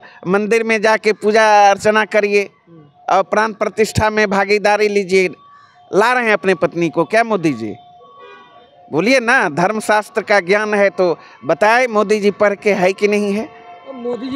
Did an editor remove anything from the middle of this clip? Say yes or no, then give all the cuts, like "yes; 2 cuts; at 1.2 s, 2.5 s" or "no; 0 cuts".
no; 0 cuts